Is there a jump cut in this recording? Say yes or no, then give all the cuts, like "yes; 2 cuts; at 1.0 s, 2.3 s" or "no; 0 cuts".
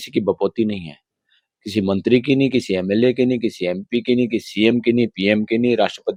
no; 0 cuts